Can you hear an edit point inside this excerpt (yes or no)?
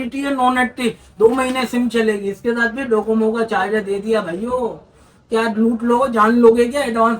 no